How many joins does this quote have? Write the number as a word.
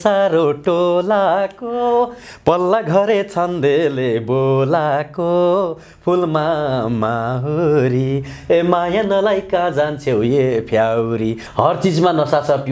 one